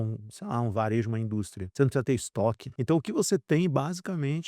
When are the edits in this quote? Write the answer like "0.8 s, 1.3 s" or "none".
1.6 s, 2.7 s